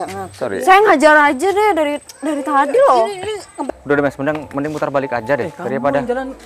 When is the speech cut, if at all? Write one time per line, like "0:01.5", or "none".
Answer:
0:03.5